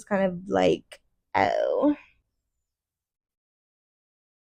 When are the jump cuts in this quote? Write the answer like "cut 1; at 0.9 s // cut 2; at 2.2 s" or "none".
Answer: none